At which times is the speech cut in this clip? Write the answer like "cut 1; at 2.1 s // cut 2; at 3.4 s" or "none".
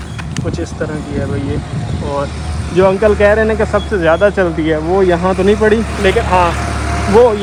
none